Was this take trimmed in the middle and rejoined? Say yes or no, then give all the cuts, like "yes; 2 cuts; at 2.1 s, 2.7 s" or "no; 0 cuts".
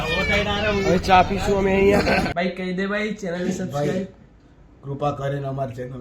yes; 1 cut; at 2.3 s